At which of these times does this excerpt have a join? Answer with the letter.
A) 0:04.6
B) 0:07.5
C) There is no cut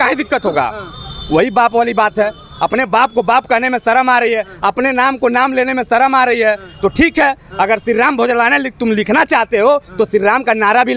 C